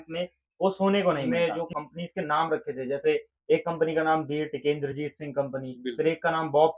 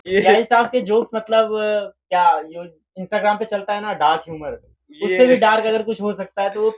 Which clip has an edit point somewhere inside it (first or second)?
first